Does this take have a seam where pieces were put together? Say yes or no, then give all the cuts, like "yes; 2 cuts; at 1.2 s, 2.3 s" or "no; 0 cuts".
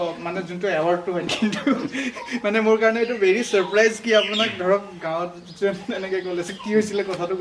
yes; 1 cut; at 1.3 s